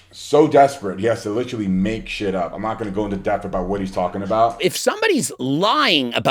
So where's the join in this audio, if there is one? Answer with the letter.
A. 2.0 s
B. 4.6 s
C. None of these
B